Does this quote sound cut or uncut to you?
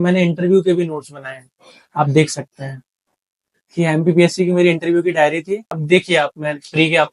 cut